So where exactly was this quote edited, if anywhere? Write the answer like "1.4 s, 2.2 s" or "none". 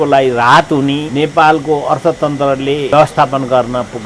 1.1 s, 2.9 s

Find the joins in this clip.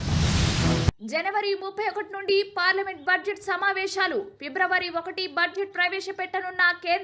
0.9 s

